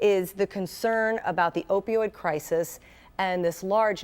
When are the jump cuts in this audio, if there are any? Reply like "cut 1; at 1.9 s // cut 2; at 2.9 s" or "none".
cut 1; at 2.4 s